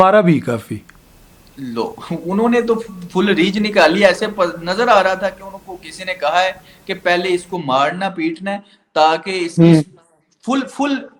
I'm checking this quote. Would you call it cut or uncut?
uncut